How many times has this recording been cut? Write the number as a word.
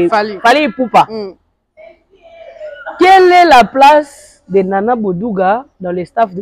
zero